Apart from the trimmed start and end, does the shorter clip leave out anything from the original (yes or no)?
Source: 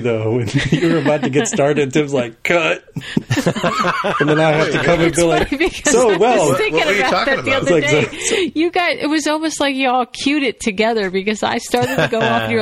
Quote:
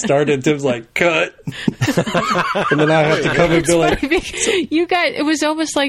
yes